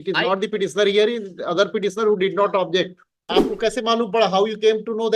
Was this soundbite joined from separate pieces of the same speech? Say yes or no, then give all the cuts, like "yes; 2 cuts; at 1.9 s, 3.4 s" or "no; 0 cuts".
yes; 1 cut; at 3.2 s